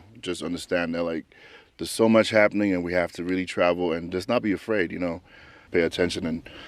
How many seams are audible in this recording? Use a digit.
1